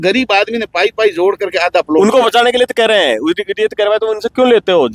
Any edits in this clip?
no; 0 cuts

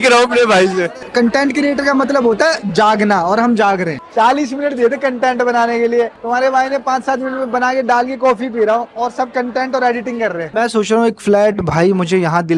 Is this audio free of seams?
no; 3 cuts; at 1.0 s, 4.0 s, 10.5 s

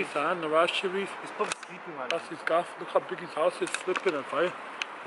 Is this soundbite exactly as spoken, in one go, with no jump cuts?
yes; 0 cuts

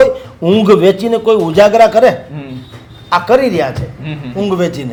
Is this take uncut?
yes; 0 cuts

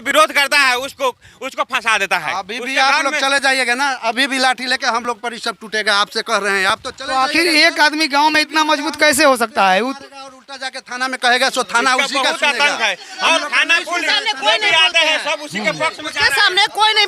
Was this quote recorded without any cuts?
yes; 0 cuts

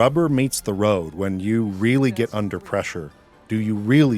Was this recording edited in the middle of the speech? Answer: no; 0 cuts

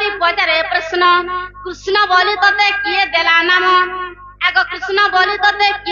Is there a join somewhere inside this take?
no; 0 cuts

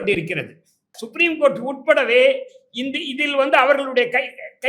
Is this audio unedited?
no; 1 cut; at 1.0 s

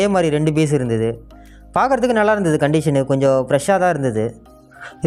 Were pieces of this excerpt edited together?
no; 0 cuts

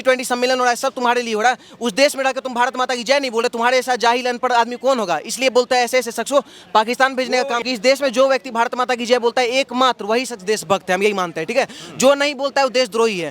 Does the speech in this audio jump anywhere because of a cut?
yes; 1 cut; at 7.7 s

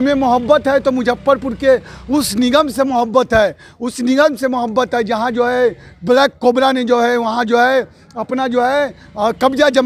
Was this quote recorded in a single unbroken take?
yes; 0 cuts

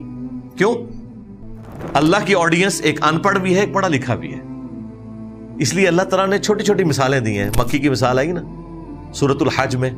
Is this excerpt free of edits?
yes; 0 cuts

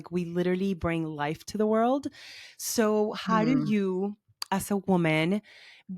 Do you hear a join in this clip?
no; 0 cuts

